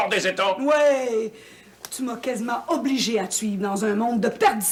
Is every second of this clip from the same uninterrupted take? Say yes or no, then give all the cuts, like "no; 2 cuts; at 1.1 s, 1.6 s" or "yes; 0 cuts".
yes; 0 cuts